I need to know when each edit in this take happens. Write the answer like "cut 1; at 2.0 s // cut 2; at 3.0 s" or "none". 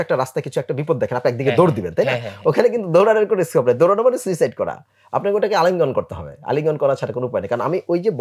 none